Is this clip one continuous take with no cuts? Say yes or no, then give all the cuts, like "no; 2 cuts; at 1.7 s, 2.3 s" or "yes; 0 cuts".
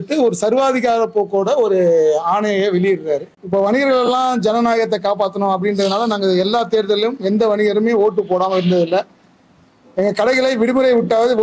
no; 1 cut; at 3.3 s